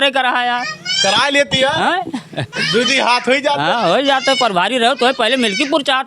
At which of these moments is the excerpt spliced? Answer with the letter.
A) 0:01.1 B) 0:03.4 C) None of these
C